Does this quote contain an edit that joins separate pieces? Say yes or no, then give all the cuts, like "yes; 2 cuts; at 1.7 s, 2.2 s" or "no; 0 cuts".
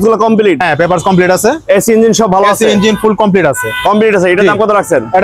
no; 0 cuts